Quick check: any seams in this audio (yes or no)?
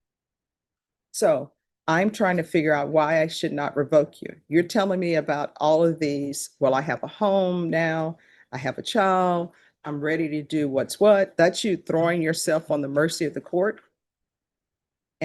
no